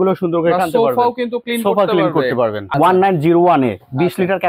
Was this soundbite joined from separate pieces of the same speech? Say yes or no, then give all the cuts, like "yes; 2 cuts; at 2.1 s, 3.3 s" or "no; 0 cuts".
yes; 1 cut; at 2.6 s